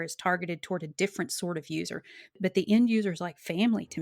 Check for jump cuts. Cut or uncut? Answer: uncut